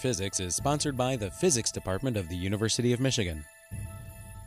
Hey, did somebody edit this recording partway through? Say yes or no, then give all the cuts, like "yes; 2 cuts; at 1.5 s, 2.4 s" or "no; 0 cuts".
yes; 1 cut; at 3.6 s